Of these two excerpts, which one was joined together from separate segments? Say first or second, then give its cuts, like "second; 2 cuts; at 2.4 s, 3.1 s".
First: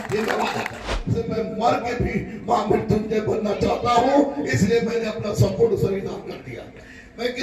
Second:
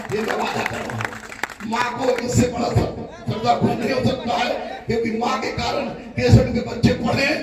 first; 1 cut; at 1.0 s